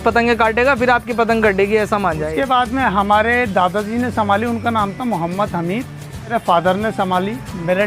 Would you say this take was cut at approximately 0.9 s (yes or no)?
no